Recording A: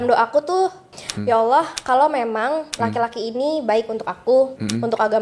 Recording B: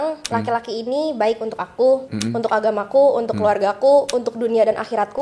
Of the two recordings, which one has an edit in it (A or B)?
A